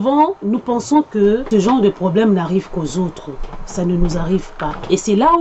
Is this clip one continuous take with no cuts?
no; 1 cut; at 1.4 s

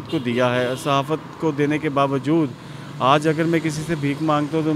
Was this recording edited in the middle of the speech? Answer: no; 0 cuts

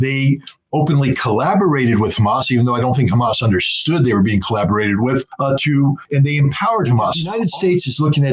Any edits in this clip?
yes; 1 cut; at 7.3 s

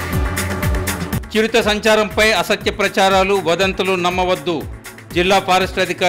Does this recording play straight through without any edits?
yes; 0 cuts

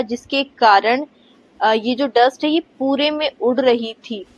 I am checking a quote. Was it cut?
no; 0 cuts

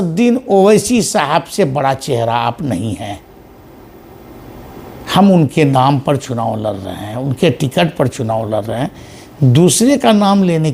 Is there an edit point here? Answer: no; 0 cuts

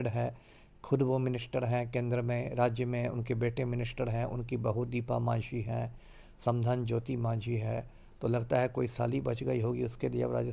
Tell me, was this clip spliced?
no; 0 cuts

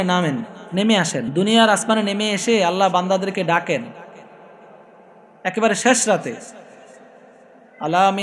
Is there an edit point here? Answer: yes; 1 cut; at 1.3 s

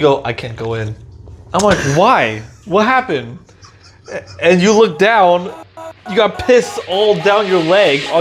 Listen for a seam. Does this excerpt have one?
no; 0 cuts

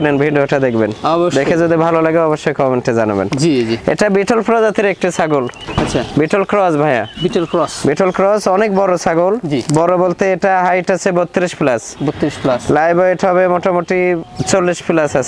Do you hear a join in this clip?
no; 0 cuts

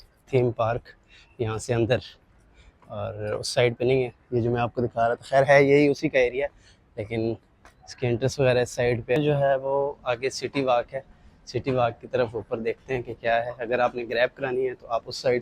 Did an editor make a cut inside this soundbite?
yes; 1 cut; at 9.2 s

